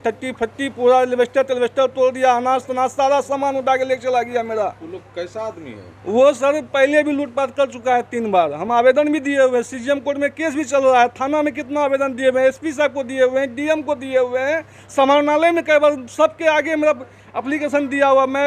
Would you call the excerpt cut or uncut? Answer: uncut